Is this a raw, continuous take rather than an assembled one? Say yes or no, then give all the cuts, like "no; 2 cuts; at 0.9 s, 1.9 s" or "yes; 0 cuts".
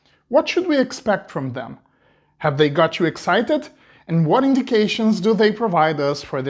yes; 0 cuts